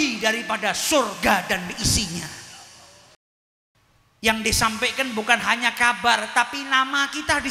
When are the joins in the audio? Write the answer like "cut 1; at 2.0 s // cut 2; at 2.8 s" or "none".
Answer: cut 1; at 3.1 s